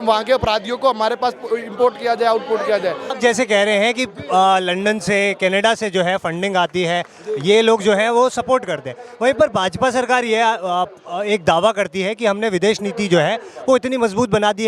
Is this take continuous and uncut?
no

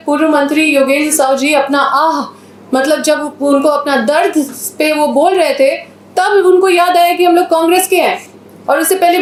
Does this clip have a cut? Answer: no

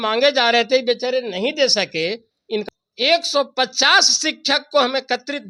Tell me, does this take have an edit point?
yes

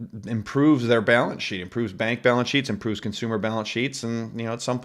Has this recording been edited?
no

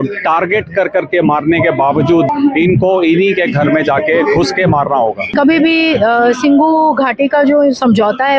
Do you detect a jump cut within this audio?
yes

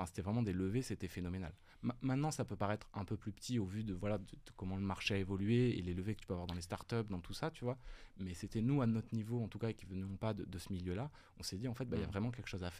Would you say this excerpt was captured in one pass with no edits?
yes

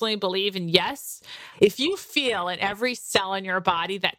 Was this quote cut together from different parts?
yes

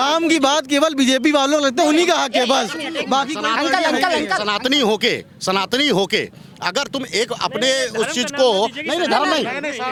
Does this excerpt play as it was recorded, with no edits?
yes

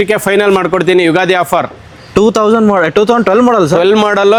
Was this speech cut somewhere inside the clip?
no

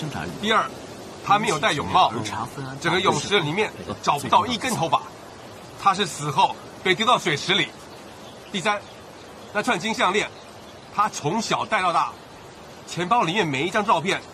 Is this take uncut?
yes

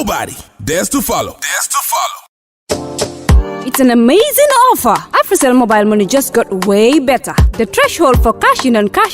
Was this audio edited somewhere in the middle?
yes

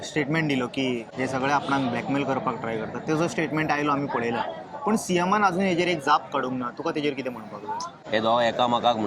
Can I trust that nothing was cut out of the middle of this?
no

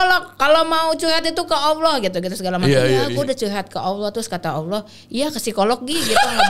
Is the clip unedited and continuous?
no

